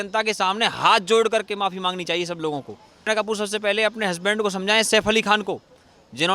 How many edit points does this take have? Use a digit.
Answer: 1